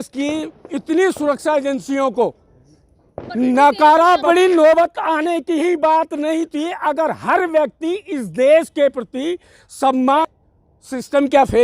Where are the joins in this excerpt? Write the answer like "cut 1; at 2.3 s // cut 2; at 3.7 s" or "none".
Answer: cut 1; at 4.6 s // cut 2; at 10.7 s